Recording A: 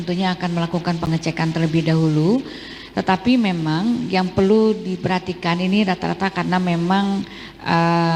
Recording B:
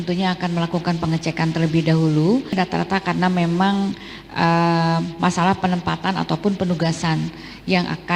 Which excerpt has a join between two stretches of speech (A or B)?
B